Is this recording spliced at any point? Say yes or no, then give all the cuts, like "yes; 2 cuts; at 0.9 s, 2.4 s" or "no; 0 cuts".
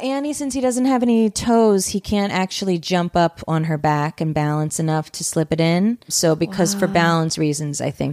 yes; 1 cut; at 6.1 s